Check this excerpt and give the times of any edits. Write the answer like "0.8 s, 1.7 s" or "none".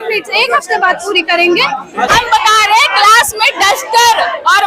2.1 s